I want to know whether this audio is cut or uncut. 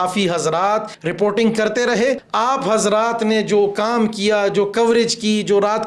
cut